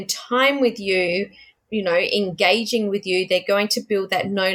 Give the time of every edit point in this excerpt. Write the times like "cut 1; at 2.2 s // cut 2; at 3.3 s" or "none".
none